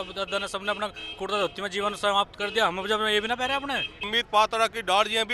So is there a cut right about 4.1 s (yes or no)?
yes